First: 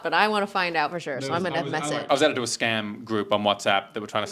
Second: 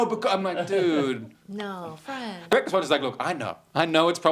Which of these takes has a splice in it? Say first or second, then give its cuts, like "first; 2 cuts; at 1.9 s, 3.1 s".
second; 1 cut; at 2.5 s